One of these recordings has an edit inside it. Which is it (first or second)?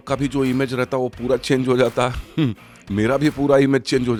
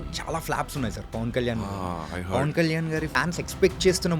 second